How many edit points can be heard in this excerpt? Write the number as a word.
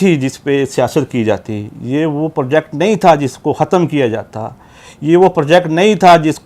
zero